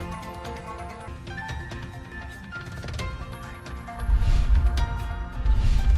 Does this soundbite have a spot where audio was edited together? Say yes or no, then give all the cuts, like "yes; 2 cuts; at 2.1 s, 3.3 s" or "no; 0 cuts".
yes; 2 cuts; at 1.1 s, 2.9 s